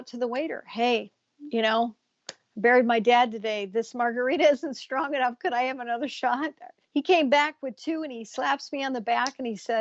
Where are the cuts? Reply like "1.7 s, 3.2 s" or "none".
none